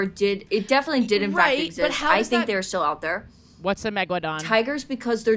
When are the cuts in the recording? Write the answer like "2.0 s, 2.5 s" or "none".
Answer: 4.4 s